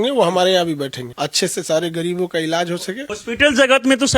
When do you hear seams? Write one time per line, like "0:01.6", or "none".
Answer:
0:01.0
0:03.1